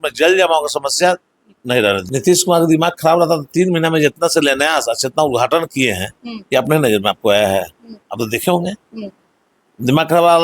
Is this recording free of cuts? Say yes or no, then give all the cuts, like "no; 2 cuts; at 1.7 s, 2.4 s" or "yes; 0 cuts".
no; 1 cut; at 2.0 s